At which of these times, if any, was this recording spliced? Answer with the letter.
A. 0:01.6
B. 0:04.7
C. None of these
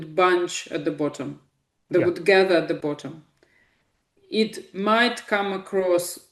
C